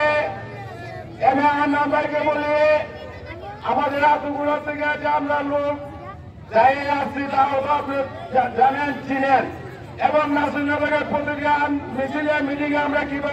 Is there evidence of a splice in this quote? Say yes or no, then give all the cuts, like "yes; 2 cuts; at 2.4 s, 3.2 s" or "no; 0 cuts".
no; 0 cuts